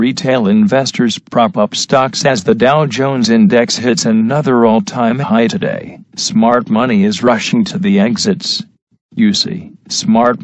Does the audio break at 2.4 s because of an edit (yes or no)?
yes